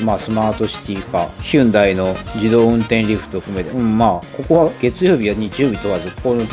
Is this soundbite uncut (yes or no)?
no